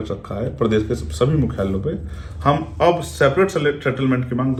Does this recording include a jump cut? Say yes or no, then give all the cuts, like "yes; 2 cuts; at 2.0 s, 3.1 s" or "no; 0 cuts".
no; 0 cuts